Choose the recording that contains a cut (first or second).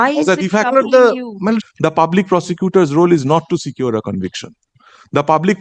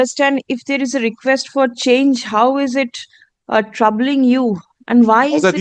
first